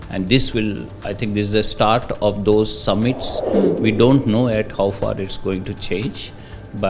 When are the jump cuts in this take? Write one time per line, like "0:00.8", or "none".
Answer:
0:03.4